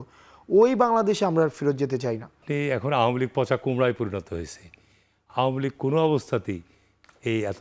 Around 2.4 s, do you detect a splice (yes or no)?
yes